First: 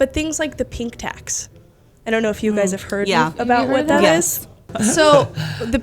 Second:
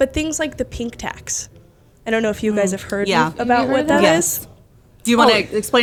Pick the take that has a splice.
first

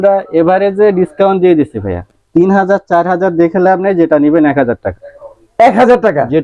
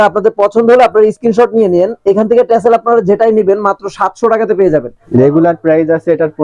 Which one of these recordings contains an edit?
second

